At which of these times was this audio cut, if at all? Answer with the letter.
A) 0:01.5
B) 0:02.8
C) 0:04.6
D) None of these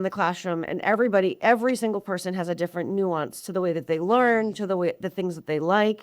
D